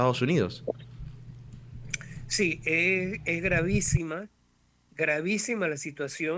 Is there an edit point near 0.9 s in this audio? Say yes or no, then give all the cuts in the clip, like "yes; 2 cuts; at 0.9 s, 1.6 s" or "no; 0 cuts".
no; 0 cuts